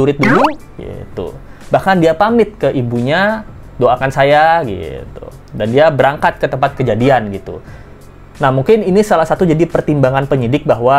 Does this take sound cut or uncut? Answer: uncut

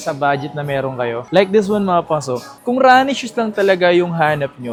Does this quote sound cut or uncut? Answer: uncut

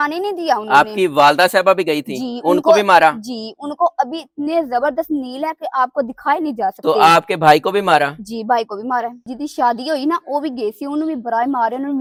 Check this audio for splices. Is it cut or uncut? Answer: uncut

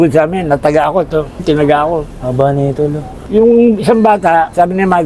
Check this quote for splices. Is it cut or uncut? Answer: uncut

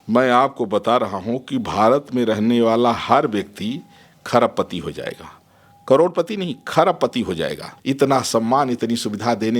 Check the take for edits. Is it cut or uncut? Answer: cut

